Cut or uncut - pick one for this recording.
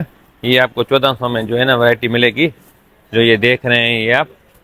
uncut